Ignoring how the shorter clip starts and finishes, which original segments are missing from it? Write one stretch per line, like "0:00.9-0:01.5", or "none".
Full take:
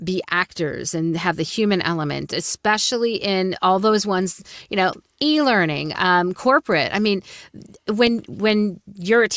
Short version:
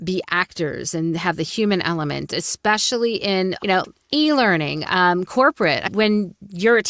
0:03.5-0:04.6
0:06.9-0:08.3